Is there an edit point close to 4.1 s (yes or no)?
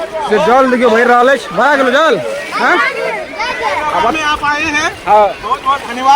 yes